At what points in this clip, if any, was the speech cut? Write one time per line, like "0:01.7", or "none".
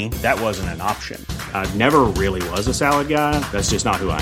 none

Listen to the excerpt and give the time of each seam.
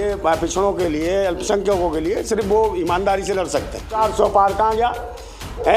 0:04.0

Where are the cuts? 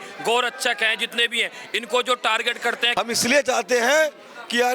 0:02.8

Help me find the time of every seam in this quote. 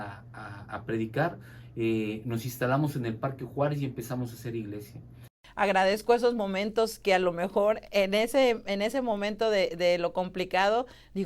0:05.4

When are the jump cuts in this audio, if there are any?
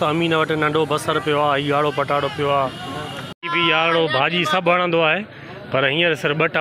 0:03.2

